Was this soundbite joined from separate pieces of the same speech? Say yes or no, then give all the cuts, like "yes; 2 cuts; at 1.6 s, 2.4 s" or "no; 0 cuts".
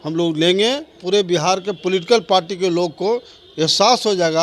yes; 1 cut; at 0.9 s